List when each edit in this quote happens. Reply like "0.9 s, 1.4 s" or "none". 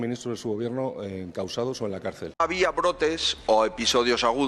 2.3 s